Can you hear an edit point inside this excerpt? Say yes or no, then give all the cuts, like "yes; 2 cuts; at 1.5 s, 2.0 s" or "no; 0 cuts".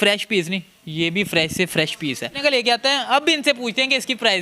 yes; 1 cut; at 2.4 s